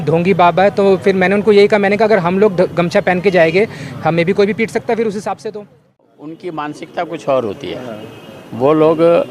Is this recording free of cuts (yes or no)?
no